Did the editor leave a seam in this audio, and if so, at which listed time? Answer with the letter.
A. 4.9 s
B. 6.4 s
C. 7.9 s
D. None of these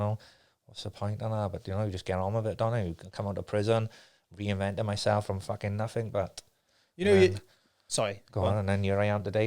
D